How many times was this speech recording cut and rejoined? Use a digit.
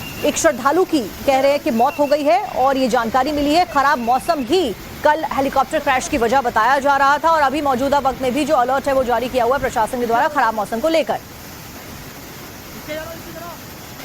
1